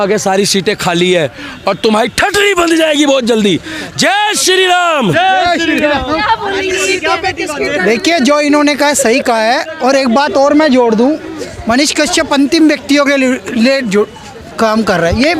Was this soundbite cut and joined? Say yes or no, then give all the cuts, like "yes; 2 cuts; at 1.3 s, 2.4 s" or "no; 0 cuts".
no; 0 cuts